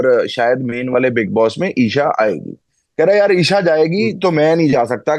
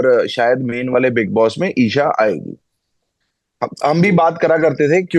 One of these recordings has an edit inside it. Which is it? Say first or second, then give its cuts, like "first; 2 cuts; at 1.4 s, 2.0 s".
first; 1 cut; at 2.8 s